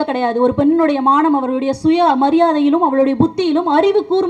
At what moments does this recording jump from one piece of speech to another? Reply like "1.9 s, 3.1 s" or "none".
none

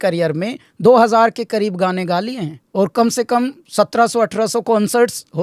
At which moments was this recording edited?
2.6 s

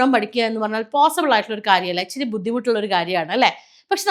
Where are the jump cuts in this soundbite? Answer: none

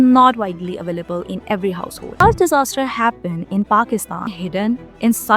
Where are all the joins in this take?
2.1 s, 4.4 s

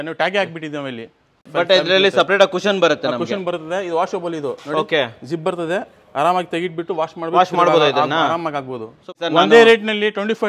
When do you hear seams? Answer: 1.4 s, 9.1 s

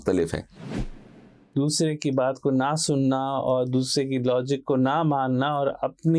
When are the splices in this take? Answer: 1.0 s

